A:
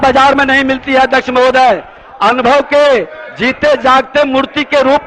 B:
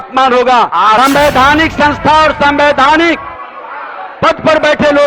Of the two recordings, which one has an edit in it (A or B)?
B